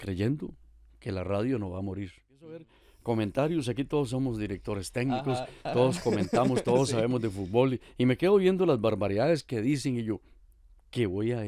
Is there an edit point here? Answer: yes; 1 cut; at 2.8 s

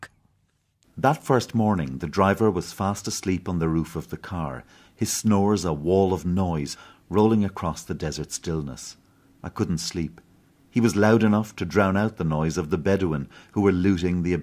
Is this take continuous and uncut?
yes; 0 cuts

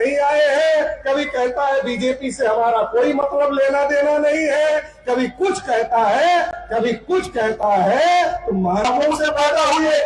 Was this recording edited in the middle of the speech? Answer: yes; 1 cut; at 8.8 s

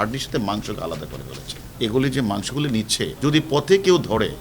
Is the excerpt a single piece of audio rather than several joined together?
no; 2 cuts; at 1.6 s, 3.1 s

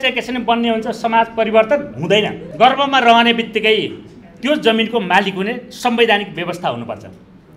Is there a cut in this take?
yes; 1 cut; at 2.4 s

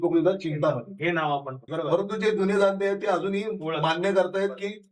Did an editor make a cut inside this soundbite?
yes; 1 cut; at 1.6 s

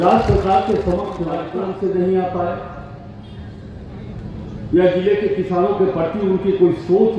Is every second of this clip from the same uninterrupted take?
no; 1 cut; at 1.4 s

